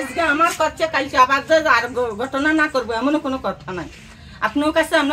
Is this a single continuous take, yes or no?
yes